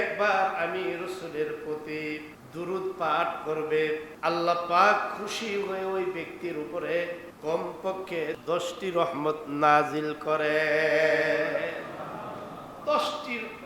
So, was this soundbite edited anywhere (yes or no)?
yes